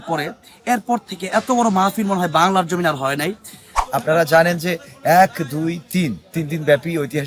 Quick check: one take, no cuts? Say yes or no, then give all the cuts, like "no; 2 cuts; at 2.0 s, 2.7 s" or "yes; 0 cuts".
no; 1 cut; at 3.8 s